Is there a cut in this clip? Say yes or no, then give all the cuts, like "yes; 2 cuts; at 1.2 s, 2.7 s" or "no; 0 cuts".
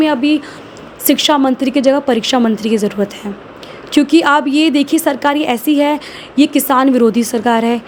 no; 0 cuts